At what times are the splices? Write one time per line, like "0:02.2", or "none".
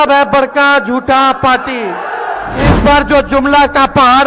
0:02.5